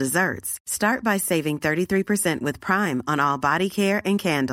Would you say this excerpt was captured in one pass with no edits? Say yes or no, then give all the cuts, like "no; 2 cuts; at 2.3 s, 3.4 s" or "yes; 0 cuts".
yes; 0 cuts